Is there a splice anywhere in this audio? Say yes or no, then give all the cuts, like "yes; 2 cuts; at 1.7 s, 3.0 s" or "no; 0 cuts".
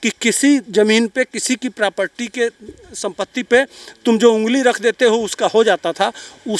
no; 0 cuts